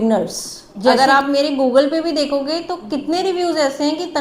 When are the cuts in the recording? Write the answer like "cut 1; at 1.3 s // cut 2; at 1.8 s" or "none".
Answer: cut 1; at 0.9 s